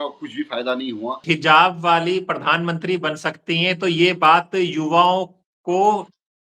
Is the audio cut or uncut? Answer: cut